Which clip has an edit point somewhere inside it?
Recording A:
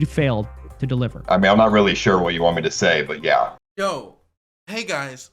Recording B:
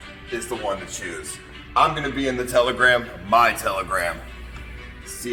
A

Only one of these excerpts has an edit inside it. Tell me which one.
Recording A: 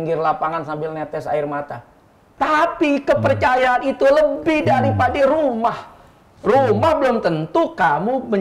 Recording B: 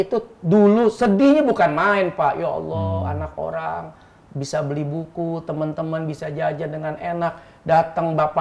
A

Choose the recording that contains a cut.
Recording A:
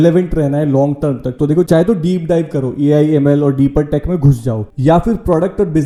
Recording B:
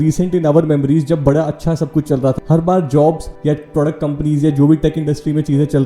B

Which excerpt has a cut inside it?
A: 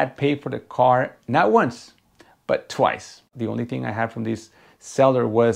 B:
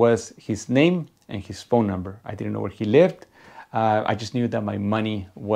A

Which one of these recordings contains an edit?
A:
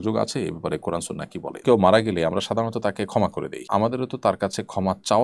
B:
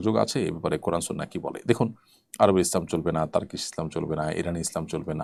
A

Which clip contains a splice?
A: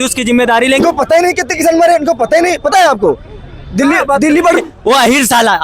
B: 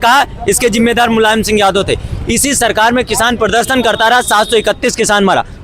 A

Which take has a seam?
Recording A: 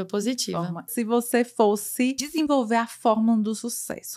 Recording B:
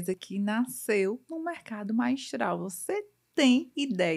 A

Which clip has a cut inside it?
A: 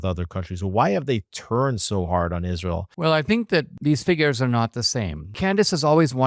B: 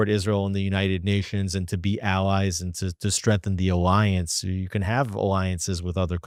A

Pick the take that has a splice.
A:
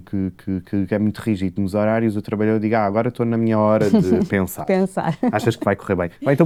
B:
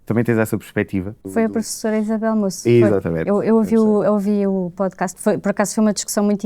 B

